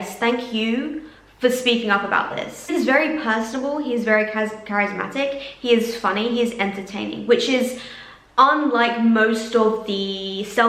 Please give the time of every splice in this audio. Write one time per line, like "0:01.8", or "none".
none